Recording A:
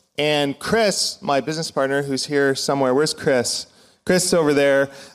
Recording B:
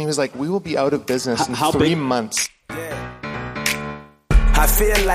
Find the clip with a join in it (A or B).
B